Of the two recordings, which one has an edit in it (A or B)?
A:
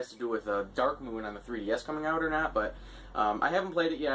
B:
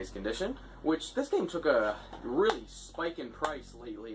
B